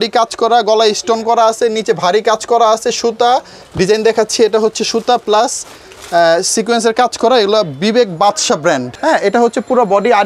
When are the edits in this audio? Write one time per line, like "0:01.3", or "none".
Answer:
0:03.6
0:08.9